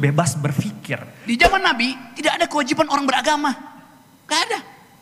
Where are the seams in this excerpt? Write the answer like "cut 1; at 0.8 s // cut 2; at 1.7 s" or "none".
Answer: cut 1; at 1.1 s